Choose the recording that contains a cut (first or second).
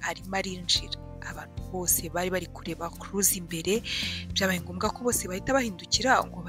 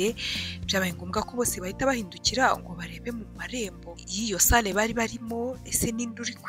second